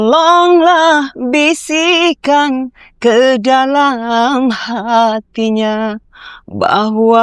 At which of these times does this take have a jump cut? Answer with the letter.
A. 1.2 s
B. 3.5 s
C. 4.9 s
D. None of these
D